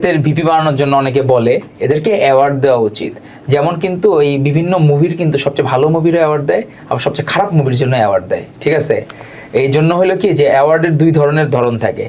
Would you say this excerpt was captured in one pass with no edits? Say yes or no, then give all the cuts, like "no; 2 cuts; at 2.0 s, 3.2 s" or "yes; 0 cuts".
yes; 0 cuts